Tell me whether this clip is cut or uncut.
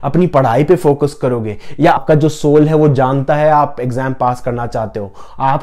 cut